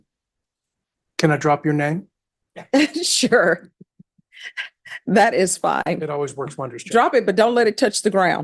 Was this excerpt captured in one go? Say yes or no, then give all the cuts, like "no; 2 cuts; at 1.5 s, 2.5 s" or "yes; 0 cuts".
yes; 0 cuts